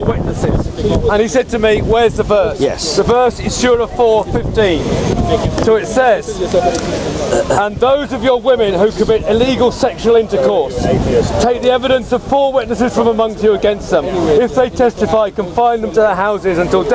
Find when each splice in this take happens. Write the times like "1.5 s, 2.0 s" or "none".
none